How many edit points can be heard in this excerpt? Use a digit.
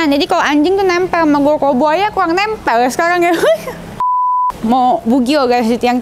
1